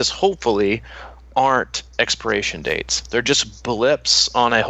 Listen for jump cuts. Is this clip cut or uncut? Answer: uncut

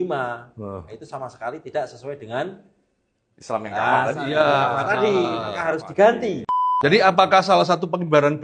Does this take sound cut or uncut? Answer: cut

